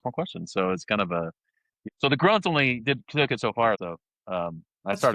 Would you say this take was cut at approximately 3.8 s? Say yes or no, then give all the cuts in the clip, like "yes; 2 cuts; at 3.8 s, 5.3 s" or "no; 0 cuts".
yes; 2 cuts; at 1.7 s, 3.8 s